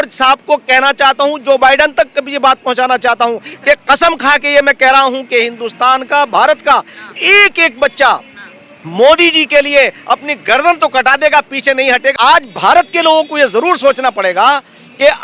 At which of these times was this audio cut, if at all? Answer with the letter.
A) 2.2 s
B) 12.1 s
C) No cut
B